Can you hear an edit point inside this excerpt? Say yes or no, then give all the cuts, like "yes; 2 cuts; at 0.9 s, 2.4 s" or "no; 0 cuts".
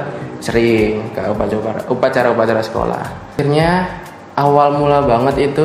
yes; 1 cut; at 3.3 s